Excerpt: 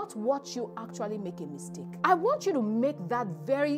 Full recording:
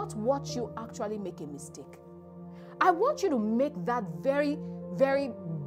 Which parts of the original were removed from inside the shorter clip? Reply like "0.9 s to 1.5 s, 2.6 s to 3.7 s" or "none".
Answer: 1.9 s to 2.7 s